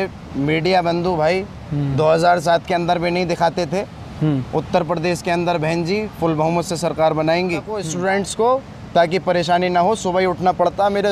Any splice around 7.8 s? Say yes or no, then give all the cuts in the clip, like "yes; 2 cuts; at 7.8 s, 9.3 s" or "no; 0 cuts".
yes; 1 cut; at 7.8 s